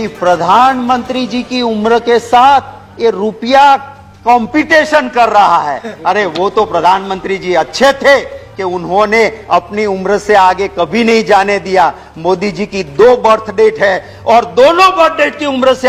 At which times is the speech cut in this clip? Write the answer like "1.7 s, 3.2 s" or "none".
none

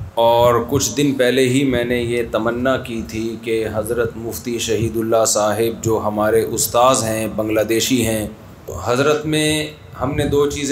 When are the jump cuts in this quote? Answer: 8.8 s

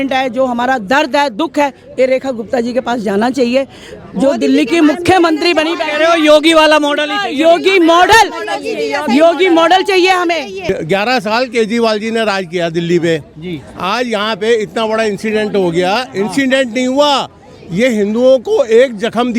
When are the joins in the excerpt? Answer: 10.6 s

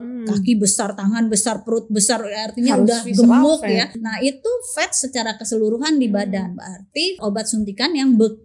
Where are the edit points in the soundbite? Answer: 3.9 s, 7.2 s

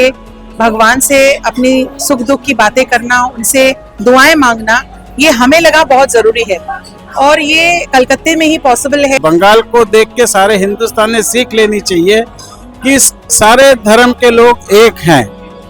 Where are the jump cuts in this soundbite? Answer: 9.2 s

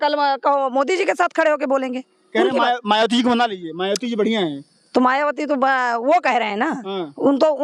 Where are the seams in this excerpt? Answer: none

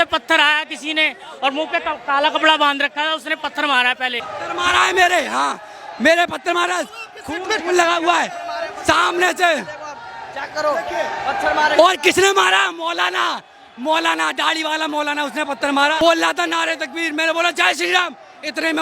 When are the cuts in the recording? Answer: 4.3 s, 16.0 s

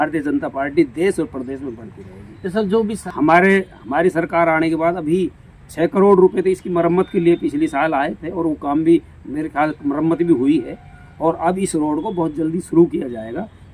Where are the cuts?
3.0 s

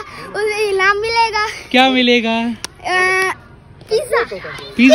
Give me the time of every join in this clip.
none

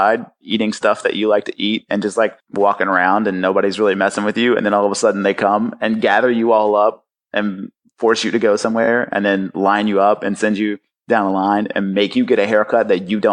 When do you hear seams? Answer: 2.4 s

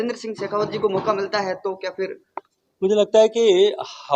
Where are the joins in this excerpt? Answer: none

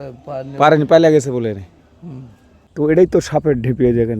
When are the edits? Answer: 2.9 s

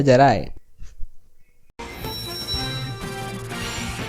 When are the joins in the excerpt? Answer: 1.7 s

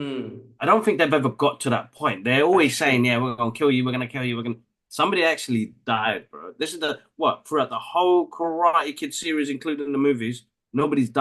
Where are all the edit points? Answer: none

